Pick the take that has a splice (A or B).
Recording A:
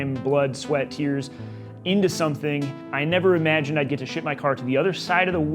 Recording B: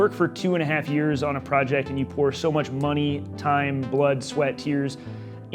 A